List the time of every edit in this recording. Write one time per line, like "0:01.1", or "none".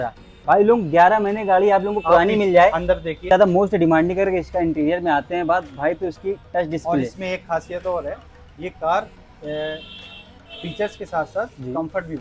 0:03.3

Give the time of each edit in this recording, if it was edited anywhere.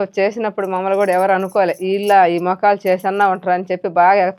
none

